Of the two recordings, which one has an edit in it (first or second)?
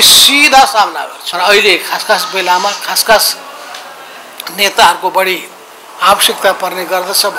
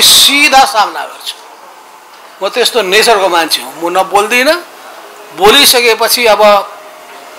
first